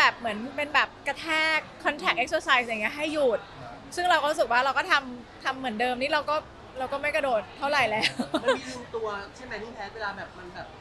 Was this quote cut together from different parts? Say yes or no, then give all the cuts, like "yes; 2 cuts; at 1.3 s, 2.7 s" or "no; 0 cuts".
no; 0 cuts